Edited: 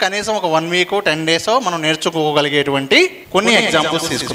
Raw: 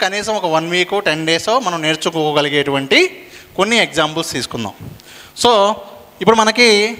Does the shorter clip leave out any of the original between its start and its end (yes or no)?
yes